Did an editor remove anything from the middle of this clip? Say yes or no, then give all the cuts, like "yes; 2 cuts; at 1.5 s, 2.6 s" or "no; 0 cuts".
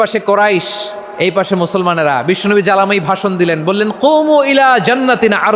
no; 0 cuts